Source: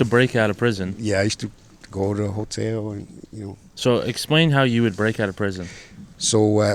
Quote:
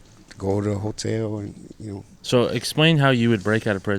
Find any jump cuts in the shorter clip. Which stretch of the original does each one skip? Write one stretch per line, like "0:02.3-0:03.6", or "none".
none

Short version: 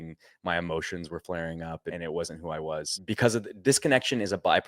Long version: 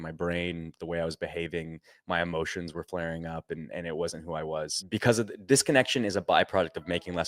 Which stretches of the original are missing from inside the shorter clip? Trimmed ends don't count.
0:03.6-0:03.8

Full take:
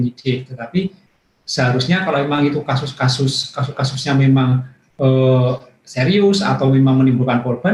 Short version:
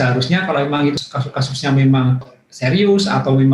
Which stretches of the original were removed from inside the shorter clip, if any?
0:02.6-0:03.4
0:04.8-0:05.7

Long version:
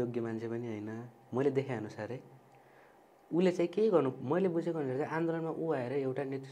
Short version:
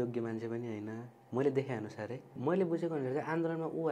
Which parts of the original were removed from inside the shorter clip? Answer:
0:02.3-0:04.2

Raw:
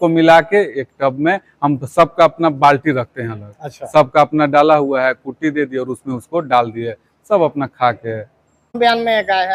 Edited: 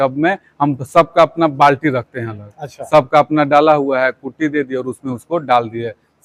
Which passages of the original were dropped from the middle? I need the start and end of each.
none

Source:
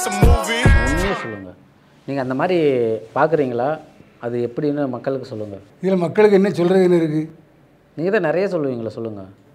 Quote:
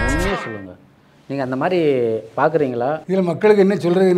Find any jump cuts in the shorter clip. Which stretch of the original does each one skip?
0:03.8-0:05.8

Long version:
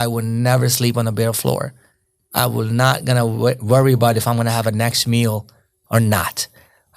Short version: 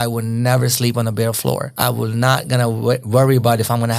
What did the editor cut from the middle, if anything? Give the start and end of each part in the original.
0:01.7-0:02.3

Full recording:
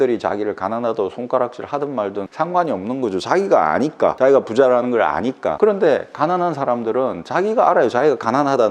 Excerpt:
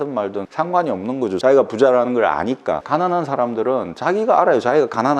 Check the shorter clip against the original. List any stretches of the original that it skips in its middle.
0:03.2-0:04.2
0:05.6-0:06.1

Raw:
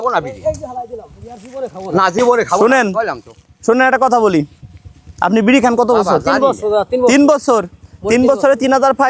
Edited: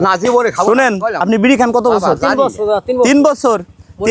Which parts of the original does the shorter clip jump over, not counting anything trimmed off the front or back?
0:03.1-0:05.2

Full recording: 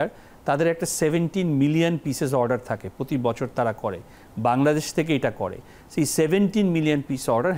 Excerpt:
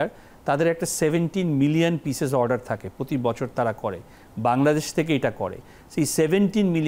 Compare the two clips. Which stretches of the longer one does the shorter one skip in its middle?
none

